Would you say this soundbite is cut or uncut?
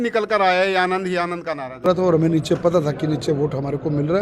cut